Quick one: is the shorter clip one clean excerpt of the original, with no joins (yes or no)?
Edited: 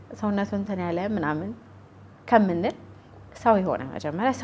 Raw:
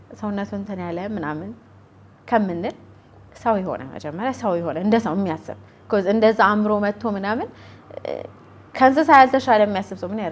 yes